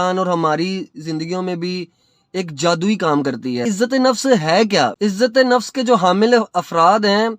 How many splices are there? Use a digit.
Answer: 2